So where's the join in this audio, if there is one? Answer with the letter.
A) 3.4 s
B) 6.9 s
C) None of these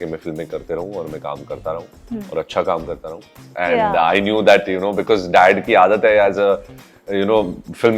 A